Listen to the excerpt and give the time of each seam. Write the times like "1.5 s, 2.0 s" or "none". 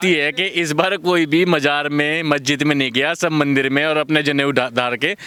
none